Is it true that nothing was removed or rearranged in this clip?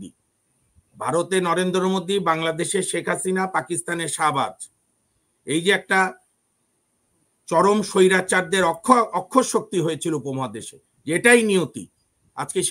yes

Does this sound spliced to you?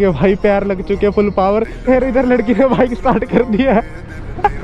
yes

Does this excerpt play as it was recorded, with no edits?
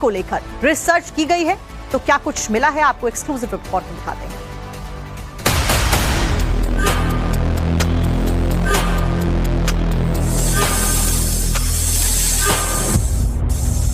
no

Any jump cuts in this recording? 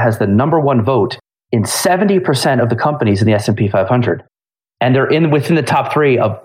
no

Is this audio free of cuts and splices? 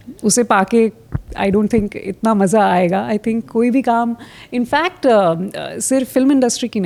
yes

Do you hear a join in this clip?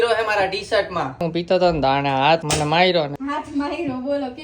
yes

